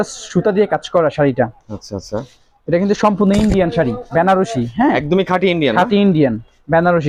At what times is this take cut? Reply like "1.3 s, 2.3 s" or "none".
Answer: none